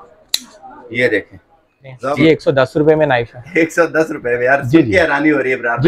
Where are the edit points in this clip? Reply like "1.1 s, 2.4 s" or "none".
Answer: 1.9 s